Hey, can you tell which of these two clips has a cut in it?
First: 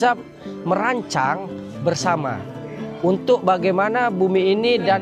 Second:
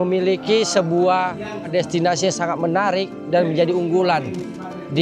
second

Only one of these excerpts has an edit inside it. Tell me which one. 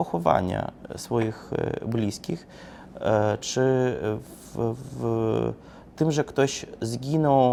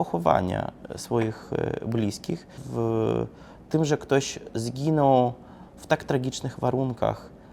second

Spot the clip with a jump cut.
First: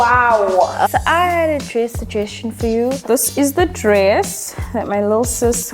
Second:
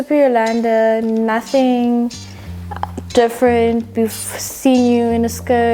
first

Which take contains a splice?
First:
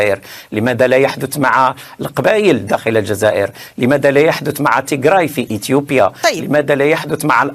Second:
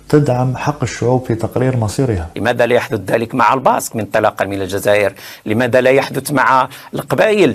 second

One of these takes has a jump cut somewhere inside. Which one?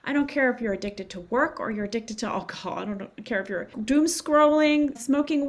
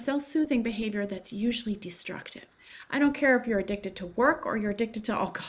first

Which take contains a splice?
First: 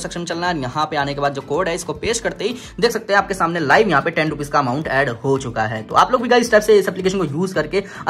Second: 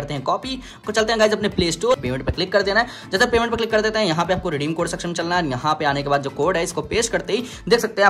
second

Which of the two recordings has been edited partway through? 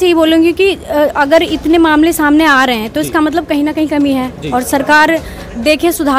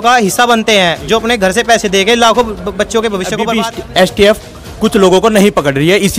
second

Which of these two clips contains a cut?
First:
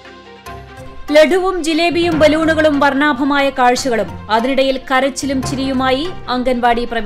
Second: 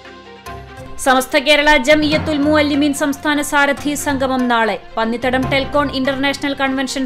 first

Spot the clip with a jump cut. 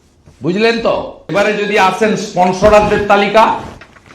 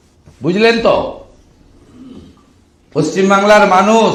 first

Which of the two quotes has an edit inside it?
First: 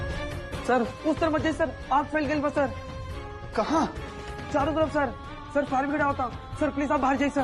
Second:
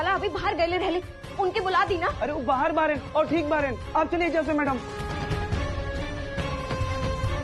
second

